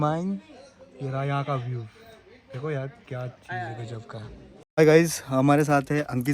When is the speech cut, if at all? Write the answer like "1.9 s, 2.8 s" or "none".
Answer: 4.6 s